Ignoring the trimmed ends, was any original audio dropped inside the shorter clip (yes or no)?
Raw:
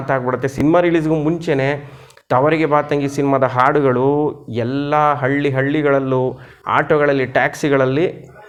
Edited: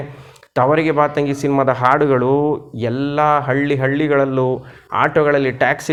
no